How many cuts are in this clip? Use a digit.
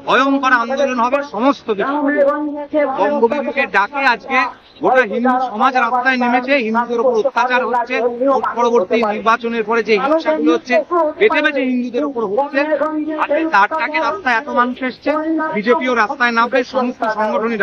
0